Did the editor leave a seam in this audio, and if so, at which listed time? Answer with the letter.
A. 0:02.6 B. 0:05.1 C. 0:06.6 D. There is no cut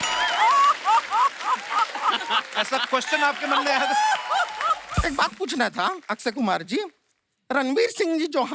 B